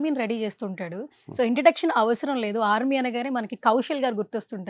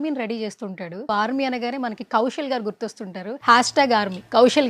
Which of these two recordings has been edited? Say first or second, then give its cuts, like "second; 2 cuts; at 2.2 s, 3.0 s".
second; 2 cuts; at 1.1 s, 3.3 s